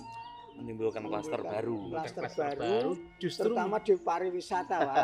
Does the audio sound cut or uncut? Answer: uncut